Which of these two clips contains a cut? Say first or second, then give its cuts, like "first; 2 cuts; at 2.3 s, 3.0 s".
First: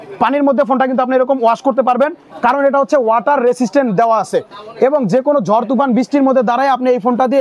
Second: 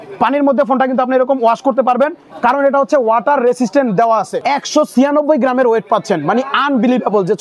second; 1 cut; at 4.4 s